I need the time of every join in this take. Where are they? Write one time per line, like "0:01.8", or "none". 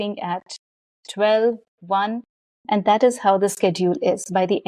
none